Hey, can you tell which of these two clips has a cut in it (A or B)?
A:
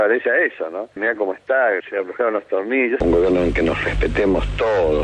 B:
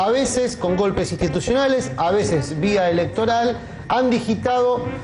A